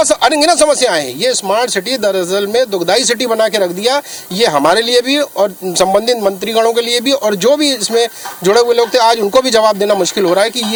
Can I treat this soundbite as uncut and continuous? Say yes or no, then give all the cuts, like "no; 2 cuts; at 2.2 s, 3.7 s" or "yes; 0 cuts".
yes; 0 cuts